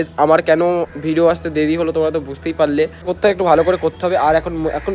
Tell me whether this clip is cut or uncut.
cut